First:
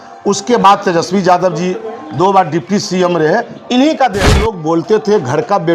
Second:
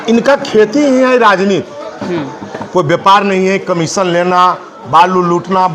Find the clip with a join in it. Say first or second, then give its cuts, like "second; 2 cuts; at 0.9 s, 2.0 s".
first; 1 cut; at 4.3 s